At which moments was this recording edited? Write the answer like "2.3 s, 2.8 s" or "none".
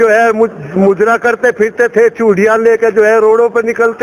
none